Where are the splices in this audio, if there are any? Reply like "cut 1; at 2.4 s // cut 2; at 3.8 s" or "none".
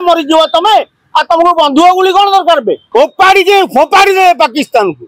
cut 1; at 2.8 s

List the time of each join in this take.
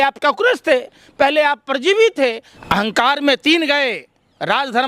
cut 1; at 2.5 s

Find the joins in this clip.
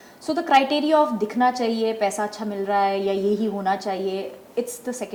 none

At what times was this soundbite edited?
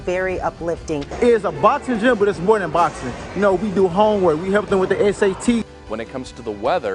cut 1; at 1.1 s // cut 2; at 5.6 s

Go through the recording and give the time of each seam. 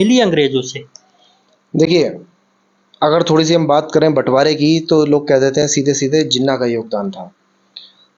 none

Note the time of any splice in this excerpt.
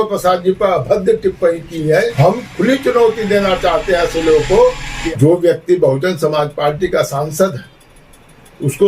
cut 1; at 2.1 s // cut 2; at 4.9 s

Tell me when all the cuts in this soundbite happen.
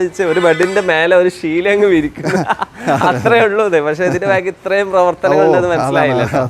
none

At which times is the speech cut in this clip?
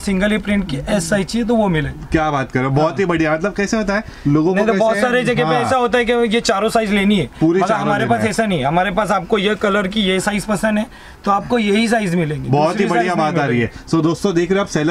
none

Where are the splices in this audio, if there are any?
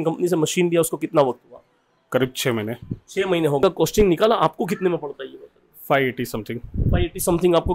cut 1; at 3.6 s

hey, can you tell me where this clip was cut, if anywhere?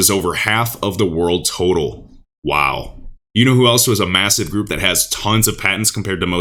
none

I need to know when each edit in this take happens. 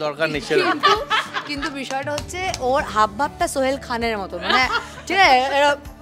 none

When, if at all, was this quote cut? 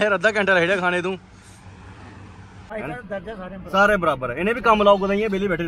cut 1; at 2.6 s

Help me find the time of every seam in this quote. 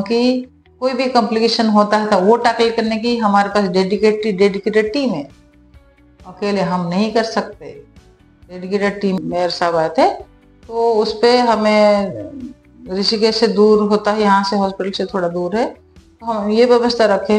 cut 1; at 9.2 s

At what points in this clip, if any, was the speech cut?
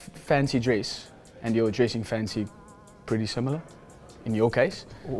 none

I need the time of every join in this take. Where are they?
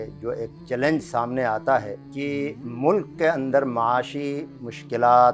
cut 1; at 2.0 s

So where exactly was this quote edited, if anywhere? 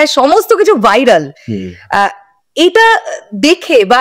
none

